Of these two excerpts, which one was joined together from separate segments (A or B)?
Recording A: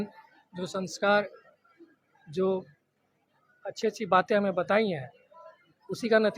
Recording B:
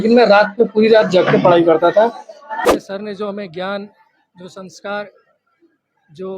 B